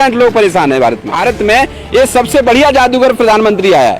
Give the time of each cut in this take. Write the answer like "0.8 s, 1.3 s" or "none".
1.2 s